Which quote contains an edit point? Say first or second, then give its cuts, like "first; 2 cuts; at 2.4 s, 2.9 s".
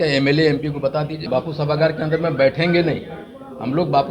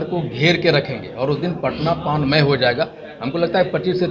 first; 1 cut; at 1.3 s